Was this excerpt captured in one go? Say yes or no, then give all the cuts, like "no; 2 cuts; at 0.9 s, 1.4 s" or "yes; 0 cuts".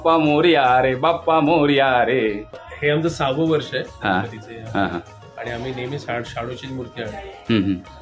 no; 1 cut; at 2.6 s